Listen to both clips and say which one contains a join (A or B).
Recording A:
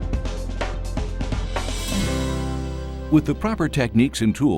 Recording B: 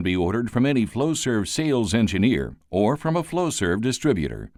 A